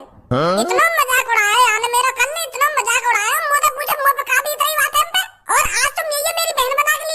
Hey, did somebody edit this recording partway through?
yes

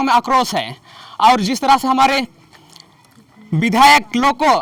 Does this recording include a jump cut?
no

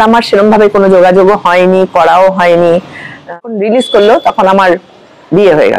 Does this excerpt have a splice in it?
yes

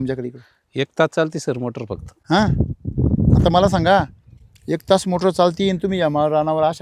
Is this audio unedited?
yes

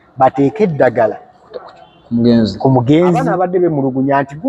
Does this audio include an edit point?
yes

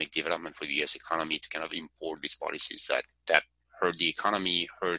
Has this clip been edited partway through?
no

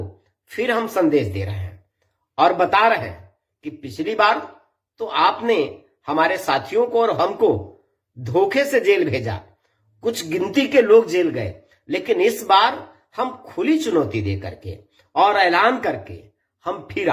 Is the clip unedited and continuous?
yes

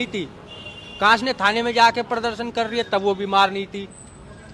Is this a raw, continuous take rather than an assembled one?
yes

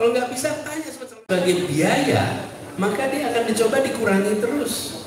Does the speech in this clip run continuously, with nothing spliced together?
no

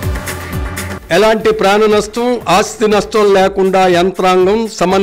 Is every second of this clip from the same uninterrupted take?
no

